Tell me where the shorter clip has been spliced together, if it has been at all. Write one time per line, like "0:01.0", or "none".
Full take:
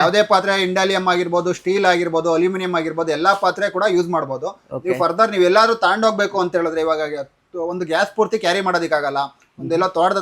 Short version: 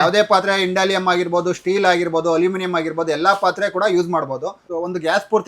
0:04.6